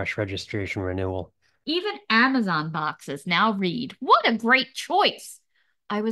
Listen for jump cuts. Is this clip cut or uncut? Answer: cut